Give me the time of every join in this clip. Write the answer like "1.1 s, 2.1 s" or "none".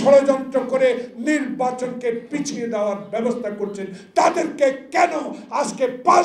none